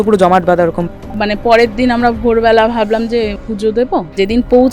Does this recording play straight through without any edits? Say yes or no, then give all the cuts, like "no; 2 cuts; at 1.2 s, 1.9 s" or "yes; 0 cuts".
no; 2 cuts; at 1.2 s, 3.8 s